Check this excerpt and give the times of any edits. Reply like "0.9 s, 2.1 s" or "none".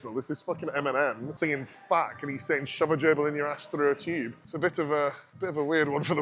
1.3 s, 4.4 s, 5.3 s